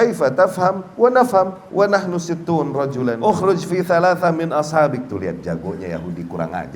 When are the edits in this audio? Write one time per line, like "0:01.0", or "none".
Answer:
0:03.2